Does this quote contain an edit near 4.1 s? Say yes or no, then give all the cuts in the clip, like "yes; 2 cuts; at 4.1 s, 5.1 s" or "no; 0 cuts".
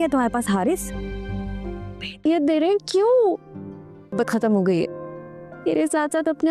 no; 1 cut; at 2.2 s